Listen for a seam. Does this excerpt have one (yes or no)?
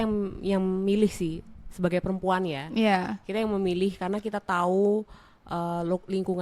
no